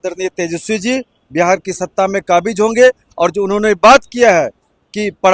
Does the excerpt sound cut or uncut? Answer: uncut